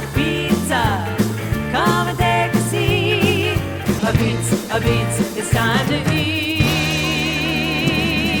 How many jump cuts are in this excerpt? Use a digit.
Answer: 0